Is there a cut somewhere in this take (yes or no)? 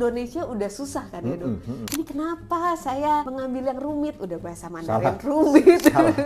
yes